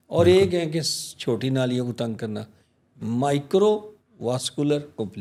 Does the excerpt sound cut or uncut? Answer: uncut